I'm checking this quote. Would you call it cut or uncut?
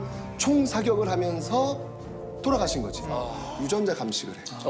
cut